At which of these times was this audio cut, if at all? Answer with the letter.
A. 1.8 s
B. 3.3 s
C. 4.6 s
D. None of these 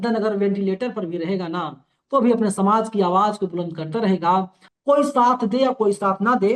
C